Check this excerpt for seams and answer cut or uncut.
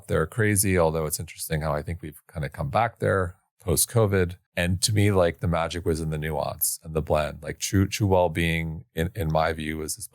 cut